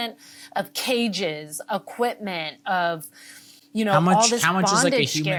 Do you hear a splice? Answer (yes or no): no